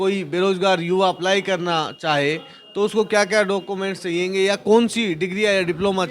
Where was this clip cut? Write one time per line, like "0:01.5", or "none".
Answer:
none

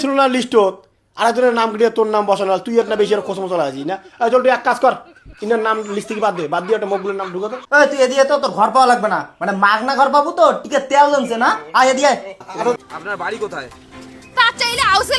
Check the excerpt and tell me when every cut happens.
0:07.6
0:12.8

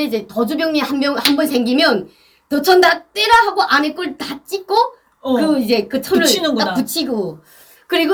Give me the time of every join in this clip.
none

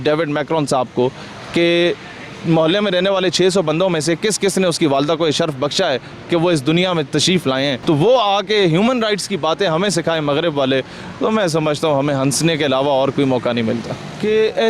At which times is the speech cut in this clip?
none

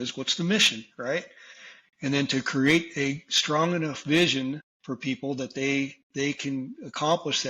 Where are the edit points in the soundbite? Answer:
0:04.7

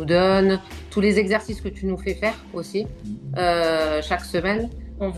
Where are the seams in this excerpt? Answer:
none

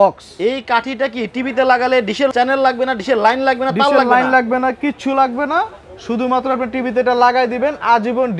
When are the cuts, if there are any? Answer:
0:02.3

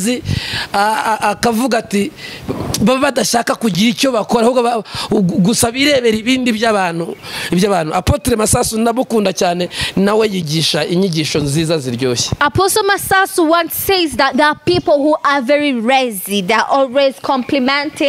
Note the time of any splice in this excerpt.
none

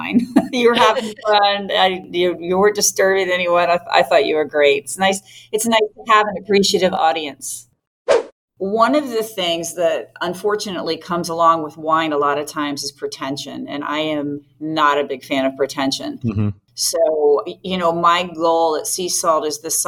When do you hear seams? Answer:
0:07.9

